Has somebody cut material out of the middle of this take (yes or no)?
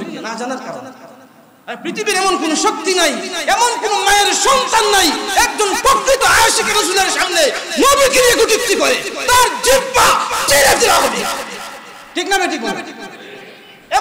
no